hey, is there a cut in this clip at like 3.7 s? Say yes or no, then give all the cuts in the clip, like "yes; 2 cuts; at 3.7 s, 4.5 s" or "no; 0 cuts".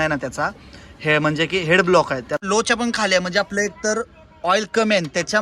no; 1 cut; at 2.4 s